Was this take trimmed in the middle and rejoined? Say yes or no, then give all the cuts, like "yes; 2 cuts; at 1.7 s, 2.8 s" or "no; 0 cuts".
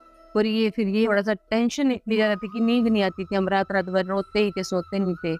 yes; 1 cut; at 1.1 s